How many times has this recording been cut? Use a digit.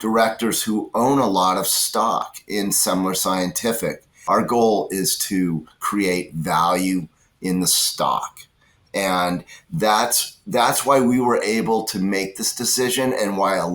1